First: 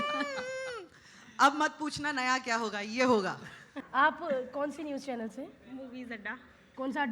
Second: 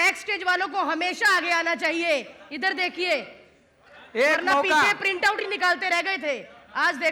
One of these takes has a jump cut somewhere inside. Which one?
first; 1 cut; at 3.8 s

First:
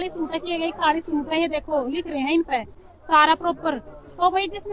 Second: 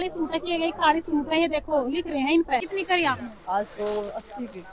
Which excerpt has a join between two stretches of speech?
second; 1 cut; at 2.7 s

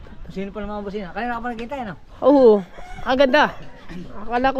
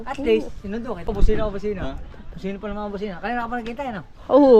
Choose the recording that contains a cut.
second; 1 cut; at 1.1 s

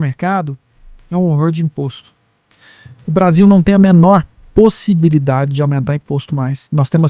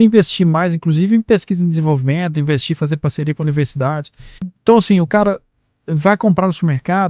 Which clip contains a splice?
second; 1 cut; at 4.5 s

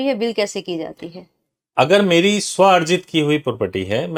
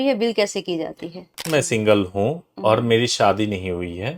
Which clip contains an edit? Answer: second; 1 cut; at 1.4 s

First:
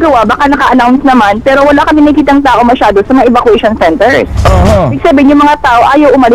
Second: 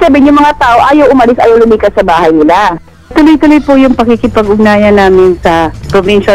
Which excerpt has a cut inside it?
second; 1 cut; at 2.9 s

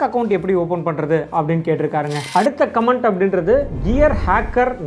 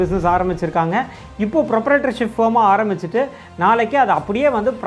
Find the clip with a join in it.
first; 2 cuts; at 2.2 s, 3.7 s

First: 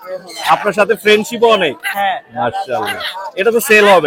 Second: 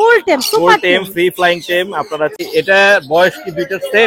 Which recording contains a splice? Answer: second; 1 cut; at 2.4 s

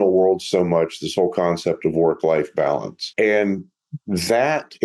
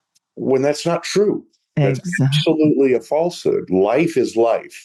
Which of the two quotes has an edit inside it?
first; 1 cut; at 3.0 s

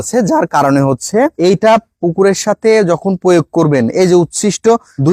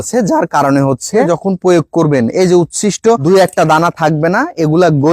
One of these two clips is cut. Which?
second; 2 cuts; at 1.3 s, 3.2 s

